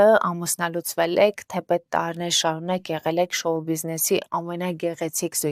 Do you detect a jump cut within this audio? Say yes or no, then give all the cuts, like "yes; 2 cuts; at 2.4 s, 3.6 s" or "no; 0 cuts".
no; 0 cuts